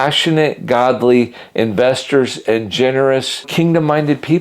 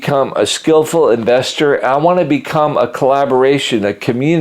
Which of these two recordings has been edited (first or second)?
first